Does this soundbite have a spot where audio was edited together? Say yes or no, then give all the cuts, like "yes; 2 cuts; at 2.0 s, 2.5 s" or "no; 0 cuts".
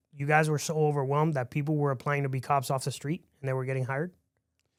no; 0 cuts